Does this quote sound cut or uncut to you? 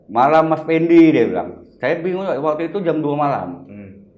uncut